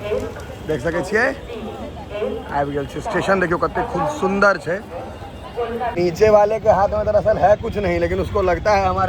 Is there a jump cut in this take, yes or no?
yes